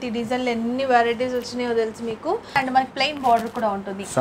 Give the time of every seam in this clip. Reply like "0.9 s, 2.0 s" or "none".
2.6 s